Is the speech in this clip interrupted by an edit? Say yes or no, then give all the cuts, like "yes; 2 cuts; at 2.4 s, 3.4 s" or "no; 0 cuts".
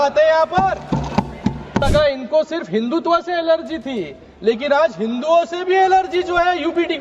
yes; 1 cut; at 1.8 s